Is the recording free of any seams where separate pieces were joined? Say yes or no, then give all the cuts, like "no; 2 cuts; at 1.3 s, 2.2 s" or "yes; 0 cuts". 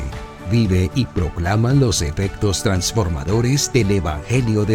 yes; 0 cuts